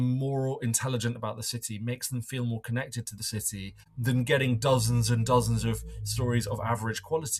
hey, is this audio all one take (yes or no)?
no